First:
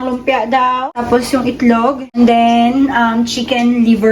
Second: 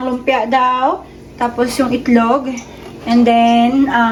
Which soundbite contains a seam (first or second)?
first